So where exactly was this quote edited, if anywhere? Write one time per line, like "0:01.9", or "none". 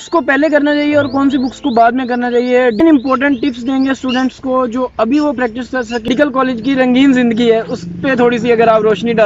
0:02.8
0:06.1